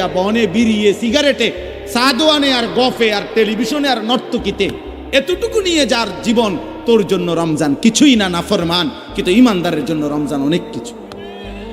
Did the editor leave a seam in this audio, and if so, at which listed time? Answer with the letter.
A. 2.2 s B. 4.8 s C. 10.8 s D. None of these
C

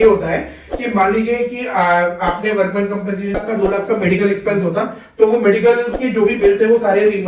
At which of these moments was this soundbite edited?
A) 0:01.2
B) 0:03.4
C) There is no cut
B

